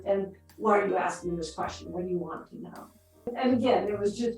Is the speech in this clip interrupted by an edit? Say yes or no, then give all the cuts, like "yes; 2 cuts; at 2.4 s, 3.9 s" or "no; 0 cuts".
yes; 1 cut; at 3.3 s